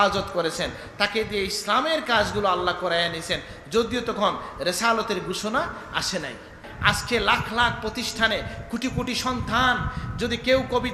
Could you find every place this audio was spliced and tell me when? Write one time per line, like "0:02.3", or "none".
0:06.7